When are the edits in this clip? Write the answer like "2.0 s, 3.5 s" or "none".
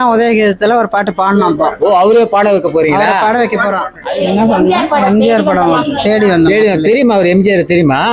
3.9 s